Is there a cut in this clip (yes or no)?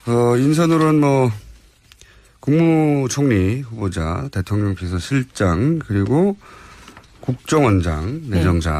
no